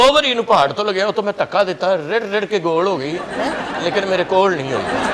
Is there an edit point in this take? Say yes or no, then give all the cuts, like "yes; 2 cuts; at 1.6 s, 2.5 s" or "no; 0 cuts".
no; 0 cuts